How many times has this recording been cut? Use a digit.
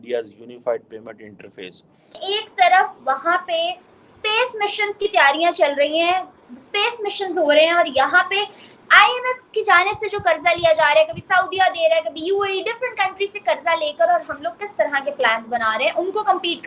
1